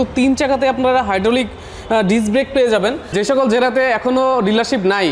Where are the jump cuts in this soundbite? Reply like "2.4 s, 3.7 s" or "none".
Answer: 3.1 s